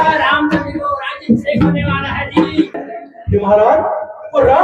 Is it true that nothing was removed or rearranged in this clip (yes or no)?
no